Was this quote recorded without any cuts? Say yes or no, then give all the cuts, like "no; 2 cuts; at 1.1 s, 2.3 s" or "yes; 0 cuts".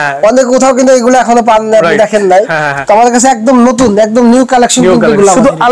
yes; 0 cuts